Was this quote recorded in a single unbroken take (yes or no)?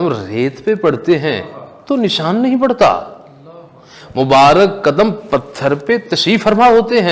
yes